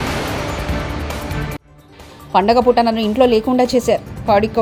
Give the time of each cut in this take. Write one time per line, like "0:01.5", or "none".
none